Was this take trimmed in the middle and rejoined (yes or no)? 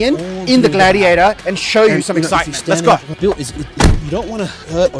yes